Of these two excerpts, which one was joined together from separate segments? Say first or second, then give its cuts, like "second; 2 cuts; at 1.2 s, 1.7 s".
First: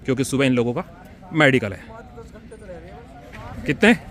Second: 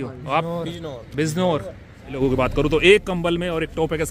second; 1 cut; at 2.2 s